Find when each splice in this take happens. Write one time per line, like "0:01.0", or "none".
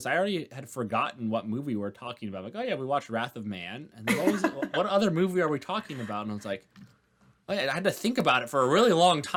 none